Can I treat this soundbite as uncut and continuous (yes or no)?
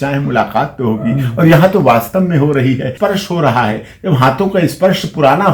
no